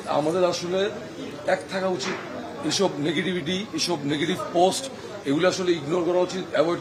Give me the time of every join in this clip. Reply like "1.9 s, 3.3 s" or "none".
none